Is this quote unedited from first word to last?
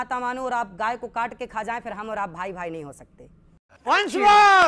yes; 0 cuts

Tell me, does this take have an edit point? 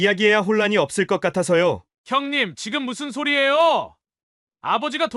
yes; 1 cut; at 1.9 s

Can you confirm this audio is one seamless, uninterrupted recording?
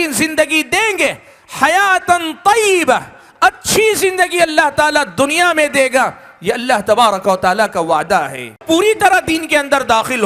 no; 1 cut; at 8.6 s

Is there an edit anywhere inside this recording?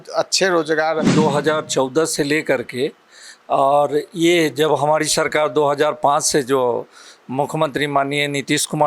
yes; 1 cut; at 1.1 s

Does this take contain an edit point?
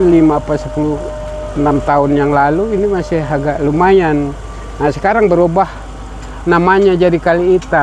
no; 0 cuts

